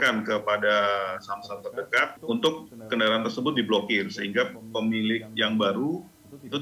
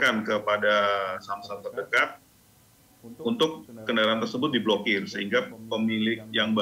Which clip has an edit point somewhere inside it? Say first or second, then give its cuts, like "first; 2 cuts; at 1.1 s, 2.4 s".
first; 1 cut; at 2.2 s